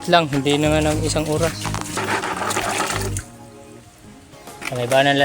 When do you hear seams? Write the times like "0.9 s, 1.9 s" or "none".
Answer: 2.0 s